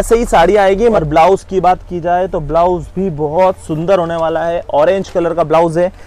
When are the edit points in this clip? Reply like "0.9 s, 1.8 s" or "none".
1.0 s